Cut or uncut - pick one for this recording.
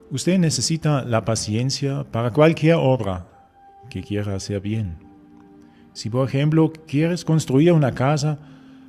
uncut